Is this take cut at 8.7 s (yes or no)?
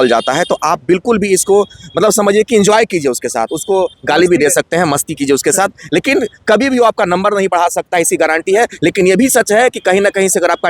no